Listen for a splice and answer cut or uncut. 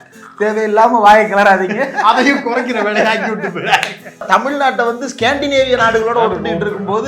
cut